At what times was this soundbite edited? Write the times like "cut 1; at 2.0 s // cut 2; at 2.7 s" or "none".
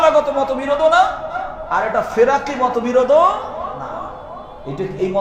none